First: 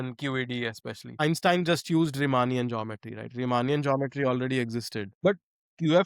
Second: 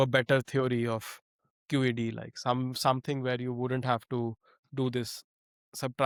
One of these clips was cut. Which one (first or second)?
first